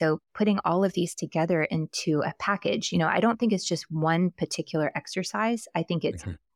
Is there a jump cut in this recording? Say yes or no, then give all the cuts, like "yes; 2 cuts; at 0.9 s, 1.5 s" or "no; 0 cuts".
no; 0 cuts